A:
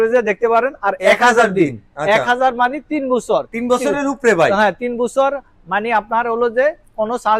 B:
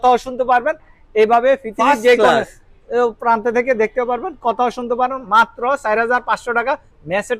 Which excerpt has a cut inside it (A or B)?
B